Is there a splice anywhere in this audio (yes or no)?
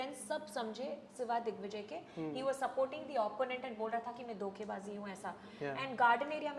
no